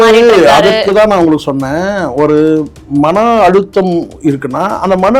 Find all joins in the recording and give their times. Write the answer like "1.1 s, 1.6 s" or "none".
none